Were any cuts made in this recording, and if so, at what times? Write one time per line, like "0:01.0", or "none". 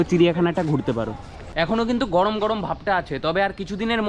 0:01.4